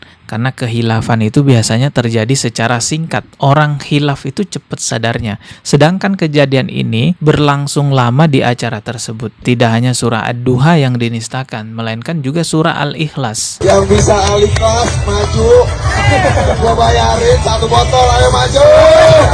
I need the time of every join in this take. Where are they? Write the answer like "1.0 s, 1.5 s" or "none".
none